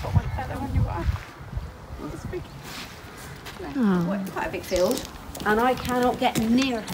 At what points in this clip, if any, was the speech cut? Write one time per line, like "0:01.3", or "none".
0:04.4